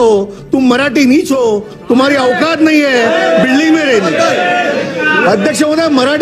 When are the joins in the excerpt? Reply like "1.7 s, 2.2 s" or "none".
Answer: none